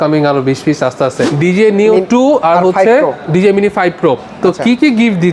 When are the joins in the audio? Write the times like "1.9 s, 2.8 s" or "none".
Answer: 1.3 s